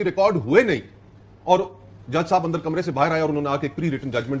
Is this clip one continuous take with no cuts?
yes; 0 cuts

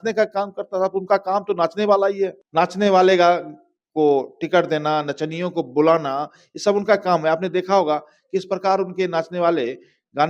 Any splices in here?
yes; 1 cut; at 2.4 s

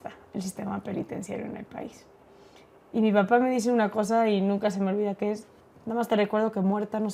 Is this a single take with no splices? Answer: yes; 0 cuts

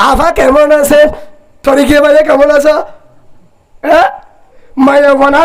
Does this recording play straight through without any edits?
no; 1 cut; at 4.5 s

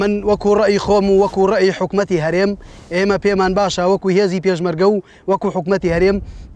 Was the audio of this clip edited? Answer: no; 0 cuts

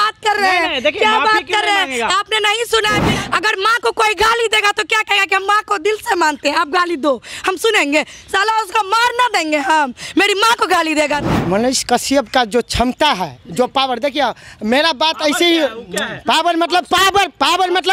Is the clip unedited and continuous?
no; 2 cuts; at 3.1 s, 11.2 s

